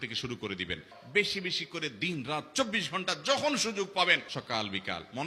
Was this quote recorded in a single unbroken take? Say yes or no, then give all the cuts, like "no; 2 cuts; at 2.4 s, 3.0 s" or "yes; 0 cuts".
no; 2 cuts; at 0.9 s, 4.3 s